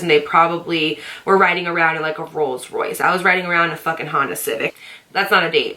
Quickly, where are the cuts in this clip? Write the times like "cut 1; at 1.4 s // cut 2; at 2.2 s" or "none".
none